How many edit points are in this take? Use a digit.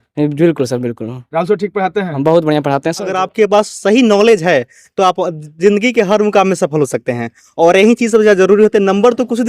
1